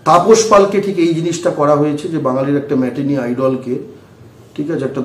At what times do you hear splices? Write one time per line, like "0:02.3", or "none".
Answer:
none